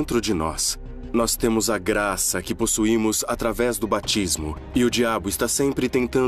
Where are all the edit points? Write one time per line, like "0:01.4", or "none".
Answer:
0:05.4